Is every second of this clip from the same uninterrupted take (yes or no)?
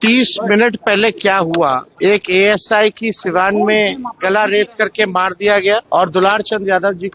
no